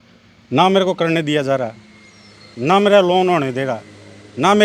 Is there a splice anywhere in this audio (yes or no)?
no